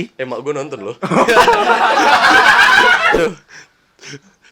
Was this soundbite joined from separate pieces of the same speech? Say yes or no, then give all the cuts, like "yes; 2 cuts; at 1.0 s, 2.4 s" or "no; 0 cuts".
yes; 1 cut; at 3.2 s